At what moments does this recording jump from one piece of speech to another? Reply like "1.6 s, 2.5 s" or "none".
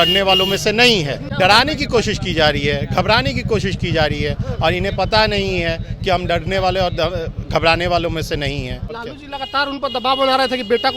1.2 s, 8.9 s